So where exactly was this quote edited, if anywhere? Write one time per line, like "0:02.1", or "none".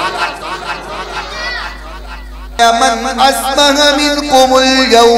0:02.6